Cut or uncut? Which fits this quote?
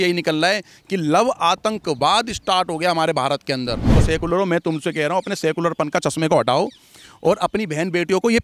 cut